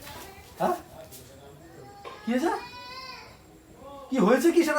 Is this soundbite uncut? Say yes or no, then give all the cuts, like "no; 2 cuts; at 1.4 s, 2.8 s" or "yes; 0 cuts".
yes; 0 cuts